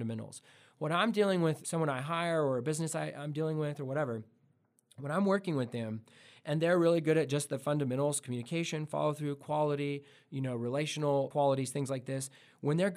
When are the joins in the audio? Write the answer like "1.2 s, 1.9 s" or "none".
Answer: 1.6 s, 11.3 s